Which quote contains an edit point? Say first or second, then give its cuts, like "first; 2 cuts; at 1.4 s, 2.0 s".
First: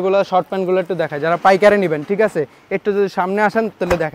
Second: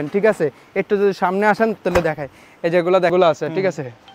second; 1 cut; at 3.1 s